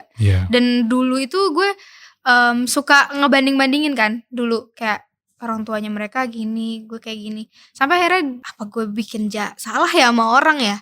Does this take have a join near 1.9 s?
no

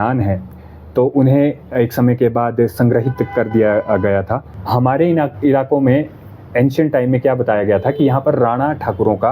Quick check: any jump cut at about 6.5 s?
no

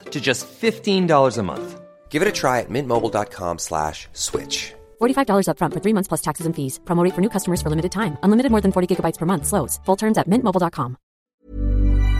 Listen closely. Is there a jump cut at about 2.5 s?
no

